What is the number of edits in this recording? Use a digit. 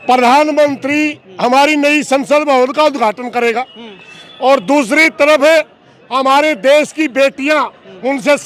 0